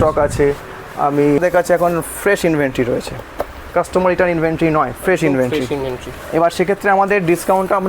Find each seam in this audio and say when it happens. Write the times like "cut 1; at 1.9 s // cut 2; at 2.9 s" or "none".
cut 1; at 1.4 s